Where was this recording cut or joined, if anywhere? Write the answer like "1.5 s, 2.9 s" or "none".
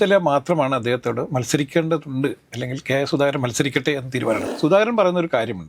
4.5 s